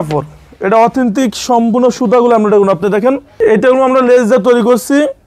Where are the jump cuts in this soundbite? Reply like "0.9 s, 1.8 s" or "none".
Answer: 3.3 s